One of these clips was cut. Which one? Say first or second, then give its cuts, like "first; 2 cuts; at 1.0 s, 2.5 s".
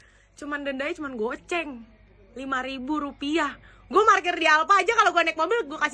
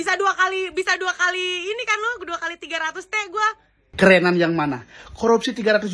second; 1 cut; at 3.9 s